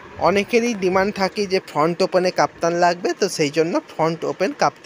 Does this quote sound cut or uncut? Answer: uncut